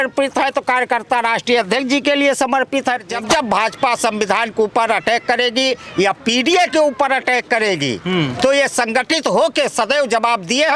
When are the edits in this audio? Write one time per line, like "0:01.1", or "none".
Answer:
0:03.1